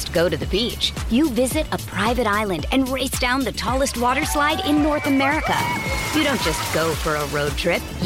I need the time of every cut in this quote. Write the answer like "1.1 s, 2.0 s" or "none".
none